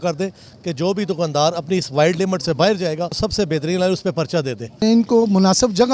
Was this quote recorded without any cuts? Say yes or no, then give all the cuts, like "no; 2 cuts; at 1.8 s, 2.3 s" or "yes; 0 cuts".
no; 2 cuts; at 3.1 s, 4.6 s